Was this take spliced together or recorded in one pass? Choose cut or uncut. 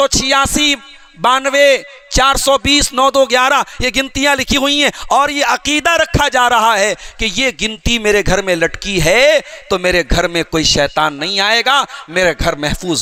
uncut